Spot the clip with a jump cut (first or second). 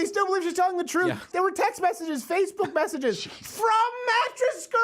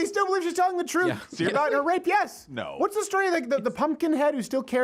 first